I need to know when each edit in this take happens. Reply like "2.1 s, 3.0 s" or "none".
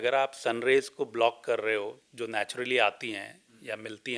none